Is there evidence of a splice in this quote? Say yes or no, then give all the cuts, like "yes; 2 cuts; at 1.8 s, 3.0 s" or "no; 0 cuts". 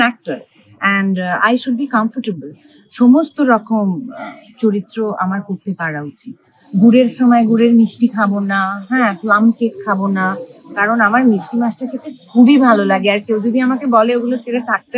yes; 1 cut; at 6.5 s